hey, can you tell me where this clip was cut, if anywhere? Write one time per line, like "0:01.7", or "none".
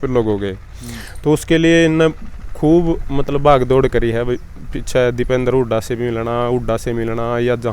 none